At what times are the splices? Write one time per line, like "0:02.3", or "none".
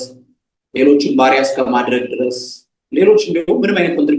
none